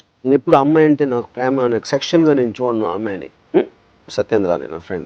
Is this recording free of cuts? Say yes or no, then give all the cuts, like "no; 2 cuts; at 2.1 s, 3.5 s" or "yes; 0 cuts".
no; 1 cut; at 4.1 s